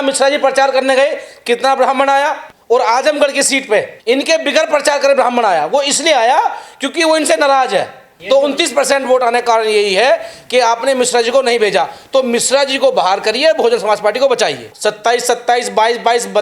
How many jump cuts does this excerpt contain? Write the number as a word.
four